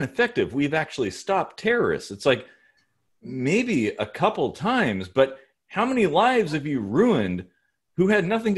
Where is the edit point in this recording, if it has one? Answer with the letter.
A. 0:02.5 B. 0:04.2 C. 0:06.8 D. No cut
D